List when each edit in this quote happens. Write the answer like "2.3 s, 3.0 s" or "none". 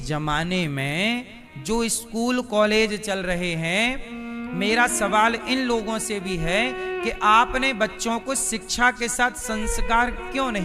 none